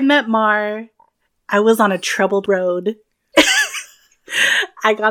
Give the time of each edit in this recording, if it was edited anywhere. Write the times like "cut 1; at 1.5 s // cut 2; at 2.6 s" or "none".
none